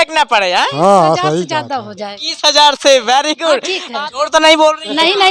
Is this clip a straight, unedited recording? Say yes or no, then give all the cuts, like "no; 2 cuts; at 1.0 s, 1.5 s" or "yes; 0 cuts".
no; 2 cuts; at 1.5 s, 3.6 s